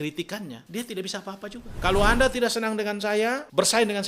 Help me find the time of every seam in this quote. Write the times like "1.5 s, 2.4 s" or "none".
1.7 s